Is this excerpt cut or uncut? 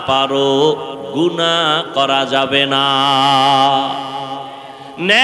uncut